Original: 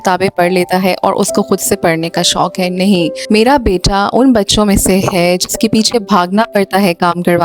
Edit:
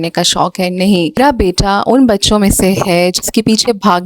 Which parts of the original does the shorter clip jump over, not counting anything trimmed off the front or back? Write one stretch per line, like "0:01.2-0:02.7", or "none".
0:03.2-0:03.4